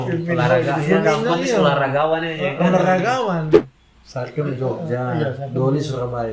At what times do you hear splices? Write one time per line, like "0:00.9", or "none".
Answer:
0:03.6

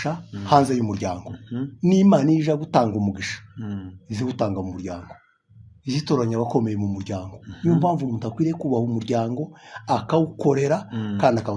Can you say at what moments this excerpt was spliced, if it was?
none

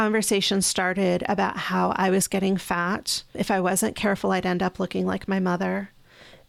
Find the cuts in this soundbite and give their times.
0:03.4

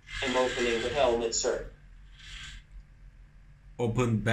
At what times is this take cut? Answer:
0:01.6

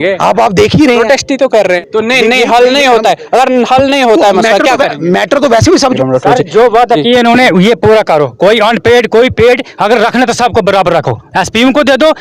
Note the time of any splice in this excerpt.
0:01.8
0:05.9

